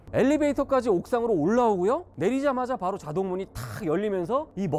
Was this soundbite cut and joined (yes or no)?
no